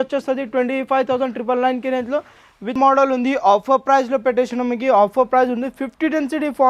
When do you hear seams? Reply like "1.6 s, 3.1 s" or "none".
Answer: 2.8 s